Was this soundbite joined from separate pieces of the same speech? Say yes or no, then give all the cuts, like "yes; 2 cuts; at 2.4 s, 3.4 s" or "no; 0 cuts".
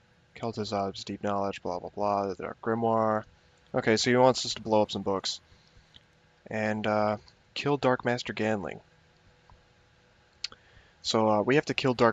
no; 0 cuts